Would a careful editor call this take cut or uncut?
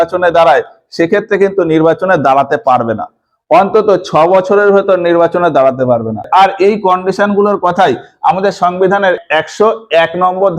cut